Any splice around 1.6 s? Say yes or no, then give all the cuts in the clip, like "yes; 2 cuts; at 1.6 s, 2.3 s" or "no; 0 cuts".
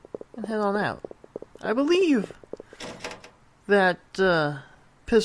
no; 1 cut; at 4.1 s